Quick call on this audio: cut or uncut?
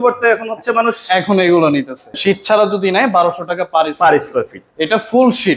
cut